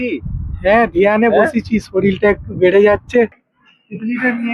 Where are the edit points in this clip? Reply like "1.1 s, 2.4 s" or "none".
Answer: 3.3 s